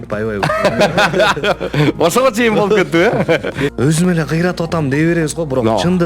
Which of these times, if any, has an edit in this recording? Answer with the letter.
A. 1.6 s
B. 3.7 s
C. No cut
B